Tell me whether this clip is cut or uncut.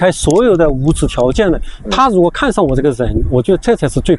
uncut